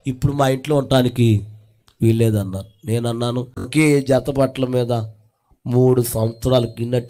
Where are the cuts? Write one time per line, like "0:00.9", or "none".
0:03.7